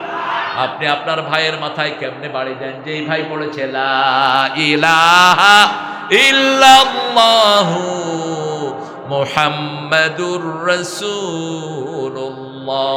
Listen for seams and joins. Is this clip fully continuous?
yes; 0 cuts

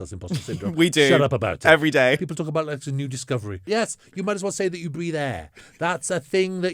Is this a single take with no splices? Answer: no; 2 cuts; at 2.1 s, 3.6 s

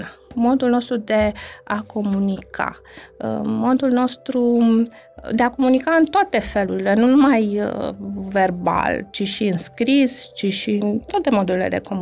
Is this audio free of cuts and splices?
yes; 0 cuts

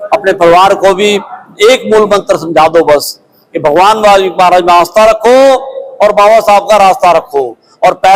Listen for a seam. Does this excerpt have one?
no; 0 cuts

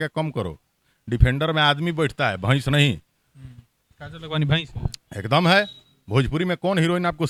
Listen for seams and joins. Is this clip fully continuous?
yes; 0 cuts

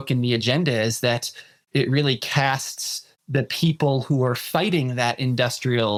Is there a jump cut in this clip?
no; 0 cuts

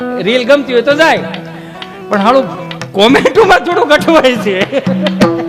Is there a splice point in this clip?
no; 0 cuts

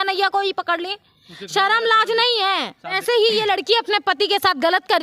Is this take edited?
yes; 1 cut; at 3.0 s

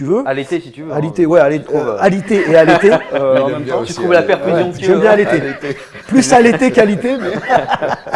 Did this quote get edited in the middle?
no; 0 cuts

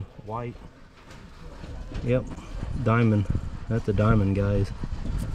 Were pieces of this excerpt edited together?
no; 0 cuts

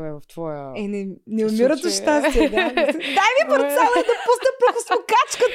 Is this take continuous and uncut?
yes; 0 cuts

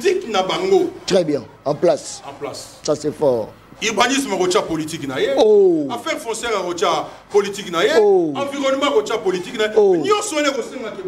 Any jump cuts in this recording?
no; 0 cuts

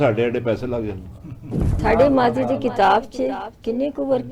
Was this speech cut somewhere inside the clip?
yes; 1 cut; at 1.7 s

